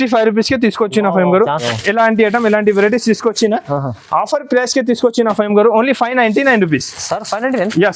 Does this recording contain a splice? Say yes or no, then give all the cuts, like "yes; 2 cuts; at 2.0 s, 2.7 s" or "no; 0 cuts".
yes; 1 cut; at 1.7 s